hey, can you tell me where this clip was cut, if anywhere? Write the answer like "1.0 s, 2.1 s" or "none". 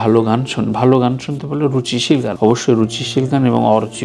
none